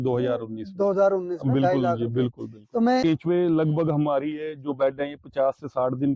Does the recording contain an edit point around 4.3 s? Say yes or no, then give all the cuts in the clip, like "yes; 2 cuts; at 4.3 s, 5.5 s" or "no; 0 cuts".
no; 1 cut; at 3.0 s